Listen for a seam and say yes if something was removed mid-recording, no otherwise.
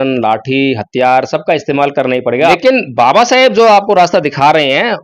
yes